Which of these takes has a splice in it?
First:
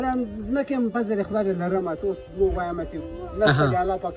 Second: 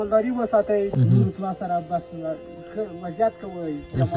second; 1 cut; at 0.9 s

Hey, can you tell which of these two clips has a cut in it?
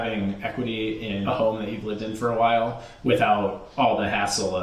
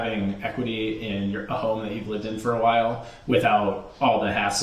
first; 1 cut; at 1.2 s

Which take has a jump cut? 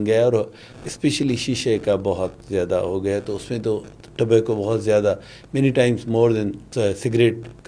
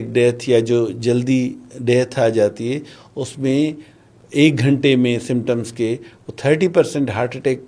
first; 1 cut; at 6.6 s

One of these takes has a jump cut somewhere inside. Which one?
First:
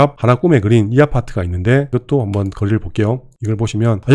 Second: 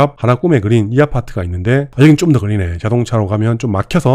second; 1 cut; at 1.9 s

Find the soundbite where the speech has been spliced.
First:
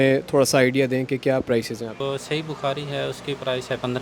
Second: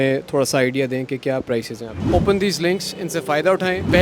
second; 1 cut; at 2.0 s

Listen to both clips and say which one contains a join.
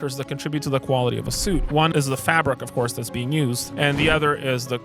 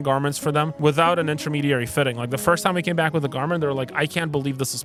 first; 2 cuts; at 1.9 s, 3.7 s

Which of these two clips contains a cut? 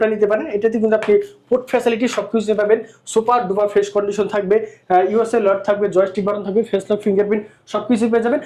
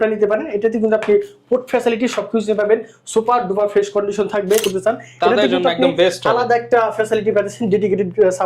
second; 1 cut; at 4.6 s

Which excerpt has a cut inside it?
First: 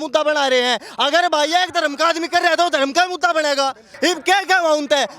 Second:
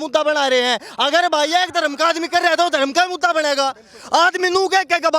first; 1 cut; at 3.8 s

